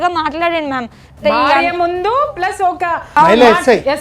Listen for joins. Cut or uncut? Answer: cut